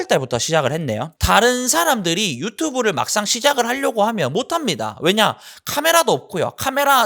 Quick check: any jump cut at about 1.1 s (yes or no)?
yes